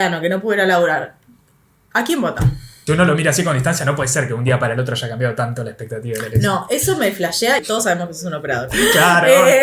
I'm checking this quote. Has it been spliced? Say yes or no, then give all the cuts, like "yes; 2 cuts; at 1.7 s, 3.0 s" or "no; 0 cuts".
yes; 2 cuts; at 2.7 s, 7.6 s